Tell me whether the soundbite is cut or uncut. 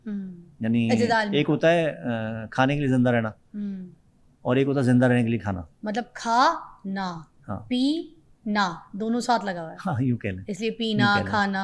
uncut